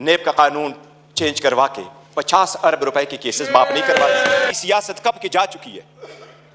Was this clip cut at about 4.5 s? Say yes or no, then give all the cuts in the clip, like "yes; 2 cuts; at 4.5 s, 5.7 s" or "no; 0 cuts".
yes; 1 cut; at 4.5 s